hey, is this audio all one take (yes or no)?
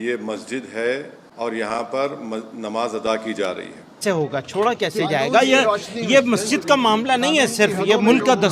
no